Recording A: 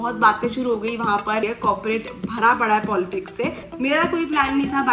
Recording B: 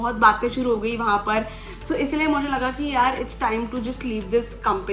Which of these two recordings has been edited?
A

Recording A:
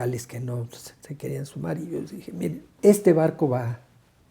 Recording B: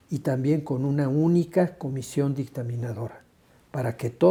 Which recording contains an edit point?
A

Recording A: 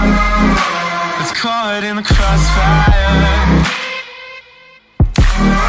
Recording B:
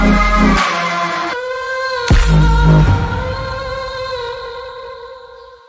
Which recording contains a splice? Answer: A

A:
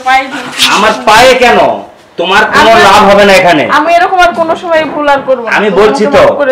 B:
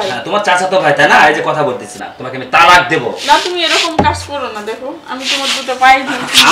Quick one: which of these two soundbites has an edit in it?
B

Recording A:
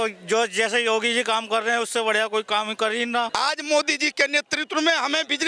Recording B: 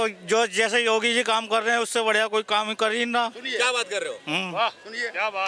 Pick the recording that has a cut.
A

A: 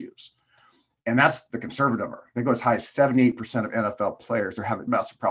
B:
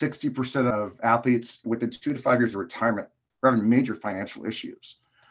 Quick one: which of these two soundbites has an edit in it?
B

